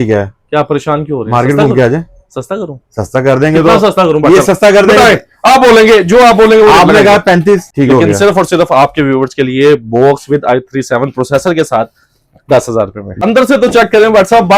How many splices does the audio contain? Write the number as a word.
two